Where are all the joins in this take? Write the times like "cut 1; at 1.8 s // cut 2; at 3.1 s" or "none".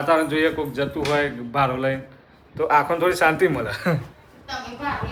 none